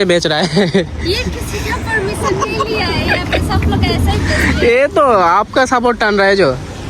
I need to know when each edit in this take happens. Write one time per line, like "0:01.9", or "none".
none